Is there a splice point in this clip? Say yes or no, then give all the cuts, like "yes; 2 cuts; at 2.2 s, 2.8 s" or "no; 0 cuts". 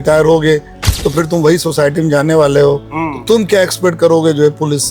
no; 0 cuts